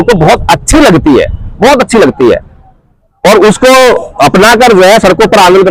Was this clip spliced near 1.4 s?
no; 0 cuts

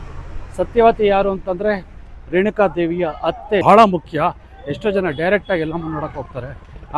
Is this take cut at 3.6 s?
yes; 1 cut; at 3.6 s

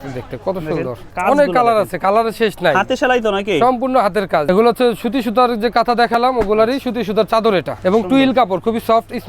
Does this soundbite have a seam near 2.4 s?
no; 3 cuts; at 1.1 s, 4.4 s, 7.7 s

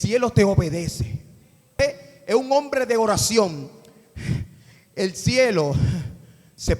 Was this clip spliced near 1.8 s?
yes; 1 cut; at 1.8 s

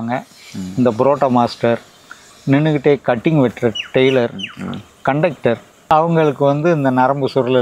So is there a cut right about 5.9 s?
yes; 1 cut; at 5.9 s

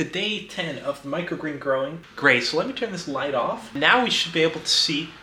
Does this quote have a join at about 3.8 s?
yes; 2 cuts; at 2.0 s, 3.8 s

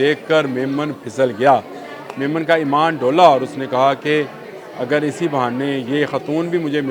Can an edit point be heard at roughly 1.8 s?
no; 0 cuts

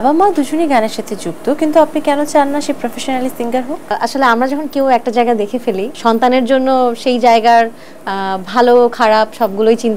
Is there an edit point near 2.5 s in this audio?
no; 2 cuts; at 3.9 s, 5.9 s

